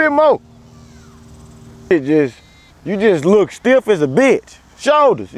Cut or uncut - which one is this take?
cut